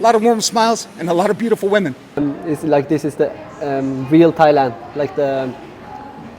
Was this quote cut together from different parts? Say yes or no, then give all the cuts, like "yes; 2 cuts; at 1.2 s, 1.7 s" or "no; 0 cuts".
yes; 1 cut; at 2.0 s